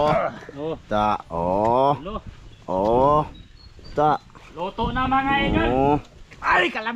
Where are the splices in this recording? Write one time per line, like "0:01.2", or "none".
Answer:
none